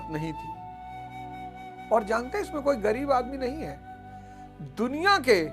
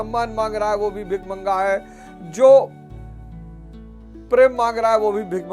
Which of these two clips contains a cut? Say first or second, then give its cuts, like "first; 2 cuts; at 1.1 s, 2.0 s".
second; 2 cuts; at 2.7 s, 4.3 s